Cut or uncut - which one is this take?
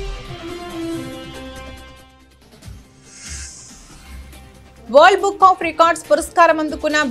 cut